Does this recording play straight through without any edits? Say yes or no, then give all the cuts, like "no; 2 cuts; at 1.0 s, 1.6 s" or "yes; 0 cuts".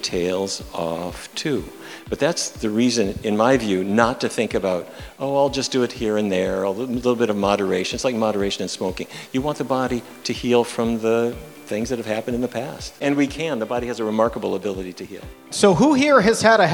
no; 2 cuts; at 13.0 s, 15.4 s